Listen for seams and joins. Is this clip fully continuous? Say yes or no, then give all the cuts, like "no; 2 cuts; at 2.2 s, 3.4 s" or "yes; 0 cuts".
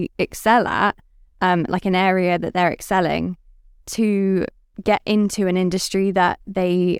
no; 1 cut; at 4.6 s